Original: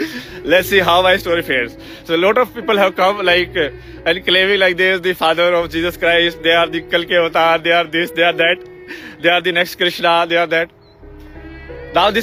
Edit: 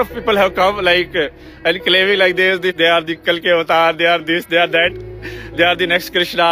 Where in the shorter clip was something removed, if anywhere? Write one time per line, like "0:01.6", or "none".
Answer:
0:02.7